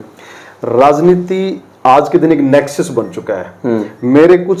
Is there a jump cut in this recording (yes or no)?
no